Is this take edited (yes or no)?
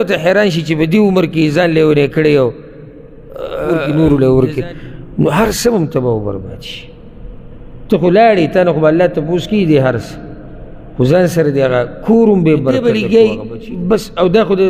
yes